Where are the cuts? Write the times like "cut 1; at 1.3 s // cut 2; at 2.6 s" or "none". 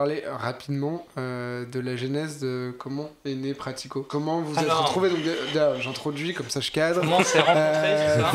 cut 1; at 4.1 s